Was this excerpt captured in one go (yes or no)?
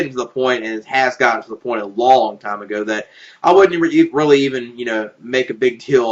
yes